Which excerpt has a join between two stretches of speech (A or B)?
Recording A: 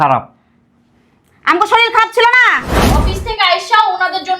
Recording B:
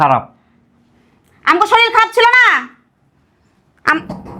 A